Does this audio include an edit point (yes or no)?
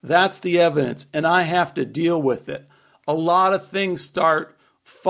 no